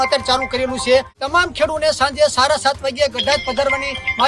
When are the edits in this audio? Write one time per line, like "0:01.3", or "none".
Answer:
0:01.2